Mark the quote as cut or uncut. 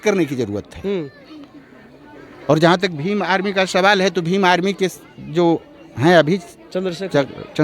uncut